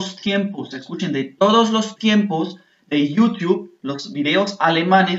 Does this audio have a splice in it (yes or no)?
no